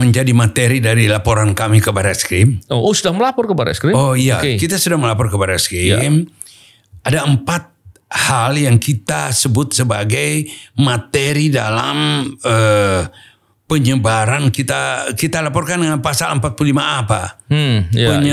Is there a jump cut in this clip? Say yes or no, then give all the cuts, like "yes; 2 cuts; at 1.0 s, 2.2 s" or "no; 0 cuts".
yes; 1 cut; at 6.6 s